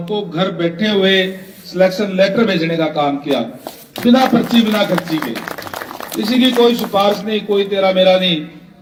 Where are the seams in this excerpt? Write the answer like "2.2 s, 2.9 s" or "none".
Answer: none